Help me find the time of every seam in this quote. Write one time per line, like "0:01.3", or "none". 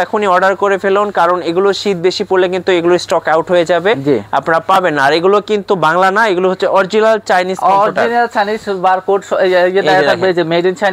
none